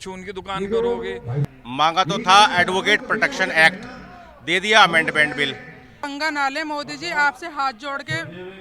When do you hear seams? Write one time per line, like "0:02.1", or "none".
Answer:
0:01.4
0:06.1